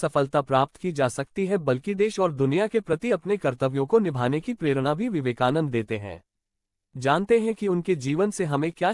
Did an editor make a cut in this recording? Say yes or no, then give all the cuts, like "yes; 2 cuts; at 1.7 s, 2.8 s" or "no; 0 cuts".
no; 0 cuts